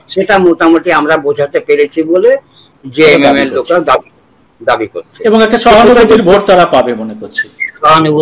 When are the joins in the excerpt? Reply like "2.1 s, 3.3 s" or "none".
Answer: none